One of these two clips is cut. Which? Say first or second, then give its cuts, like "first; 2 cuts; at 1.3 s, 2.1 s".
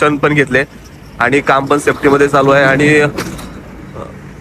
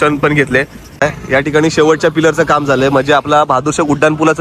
second; 1 cut; at 1.0 s